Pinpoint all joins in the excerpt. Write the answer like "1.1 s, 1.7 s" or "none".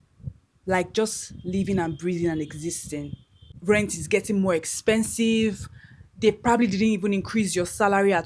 3.5 s